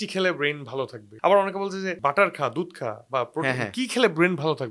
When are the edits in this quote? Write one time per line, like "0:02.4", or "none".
0:01.0
0:01.9